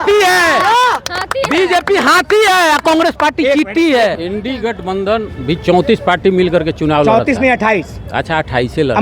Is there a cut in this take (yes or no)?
yes